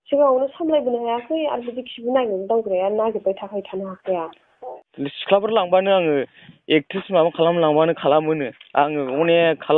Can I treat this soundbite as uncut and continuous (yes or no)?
no